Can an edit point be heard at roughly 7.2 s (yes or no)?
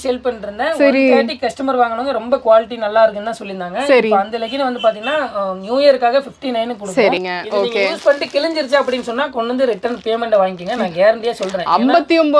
yes